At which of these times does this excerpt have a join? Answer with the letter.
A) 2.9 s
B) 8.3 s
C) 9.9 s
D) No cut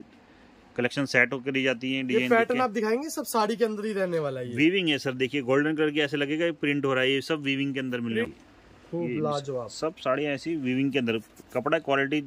B